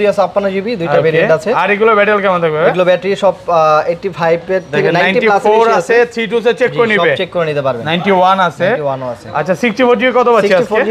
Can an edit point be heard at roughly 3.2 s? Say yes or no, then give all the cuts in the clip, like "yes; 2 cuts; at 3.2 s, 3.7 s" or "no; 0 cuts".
no; 0 cuts